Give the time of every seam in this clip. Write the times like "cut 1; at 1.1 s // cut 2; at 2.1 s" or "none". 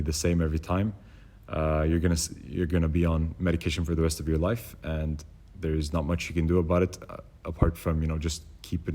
none

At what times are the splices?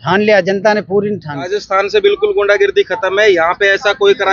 cut 1; at 1.6 s

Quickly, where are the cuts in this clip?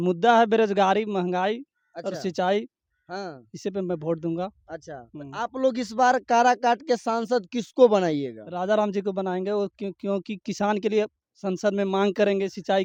none

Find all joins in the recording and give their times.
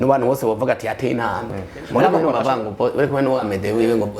cut 1; at 2.2 s

